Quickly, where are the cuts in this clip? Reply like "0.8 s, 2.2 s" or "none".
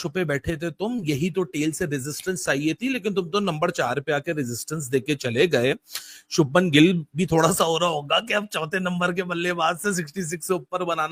none